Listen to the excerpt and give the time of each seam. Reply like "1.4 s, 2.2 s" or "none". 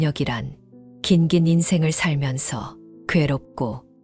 none